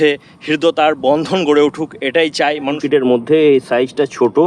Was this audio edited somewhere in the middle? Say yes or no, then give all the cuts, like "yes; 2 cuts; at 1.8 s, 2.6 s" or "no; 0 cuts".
yes; 1 cut; at 2.7 s